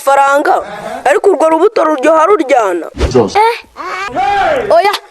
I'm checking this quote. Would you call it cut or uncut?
cut